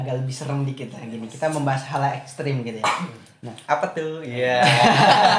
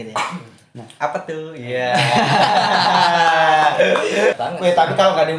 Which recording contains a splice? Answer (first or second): second